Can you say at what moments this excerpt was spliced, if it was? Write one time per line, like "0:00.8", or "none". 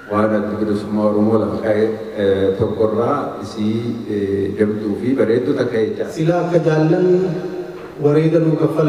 0:06.0